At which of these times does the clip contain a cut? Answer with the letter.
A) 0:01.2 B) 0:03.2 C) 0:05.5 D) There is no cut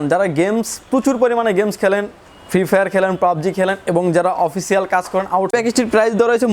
C